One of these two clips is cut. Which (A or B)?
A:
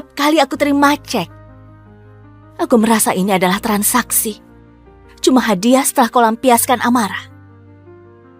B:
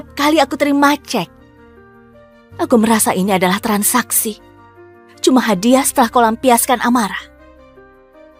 A